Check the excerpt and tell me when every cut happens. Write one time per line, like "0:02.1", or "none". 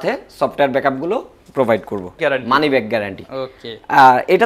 0:02.2